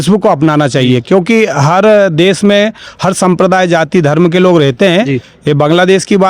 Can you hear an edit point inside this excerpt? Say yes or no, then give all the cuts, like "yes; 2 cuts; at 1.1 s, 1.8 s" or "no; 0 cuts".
no; 0 cuts